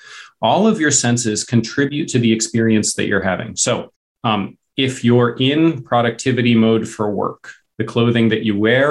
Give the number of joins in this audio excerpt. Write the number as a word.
one